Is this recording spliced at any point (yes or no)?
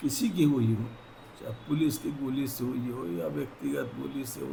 no